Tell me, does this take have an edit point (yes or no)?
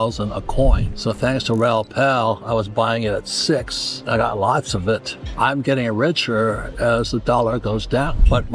no